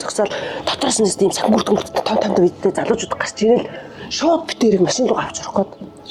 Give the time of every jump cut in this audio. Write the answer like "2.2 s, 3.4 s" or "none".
none